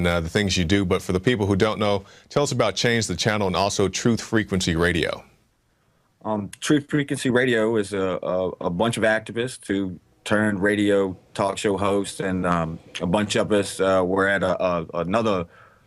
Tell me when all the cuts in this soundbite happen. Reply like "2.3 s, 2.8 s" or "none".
14.9 s